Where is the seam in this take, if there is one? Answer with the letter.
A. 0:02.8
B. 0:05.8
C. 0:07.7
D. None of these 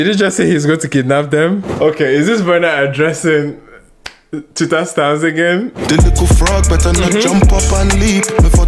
B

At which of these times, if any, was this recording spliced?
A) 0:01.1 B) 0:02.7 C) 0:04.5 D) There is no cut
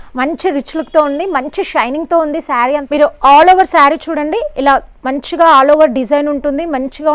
B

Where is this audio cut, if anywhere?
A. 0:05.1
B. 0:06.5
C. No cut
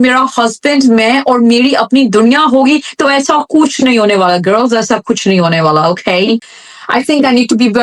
B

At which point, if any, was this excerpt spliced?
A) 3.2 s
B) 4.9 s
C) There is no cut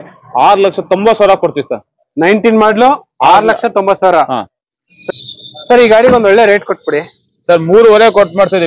B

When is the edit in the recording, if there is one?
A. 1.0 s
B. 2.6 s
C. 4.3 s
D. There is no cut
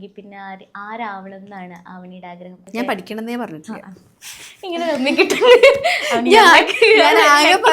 B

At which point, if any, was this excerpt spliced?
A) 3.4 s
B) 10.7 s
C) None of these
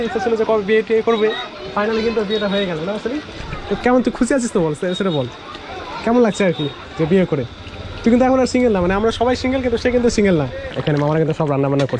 B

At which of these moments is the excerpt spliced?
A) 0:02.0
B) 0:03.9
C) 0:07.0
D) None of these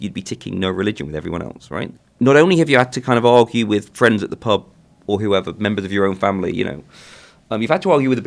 A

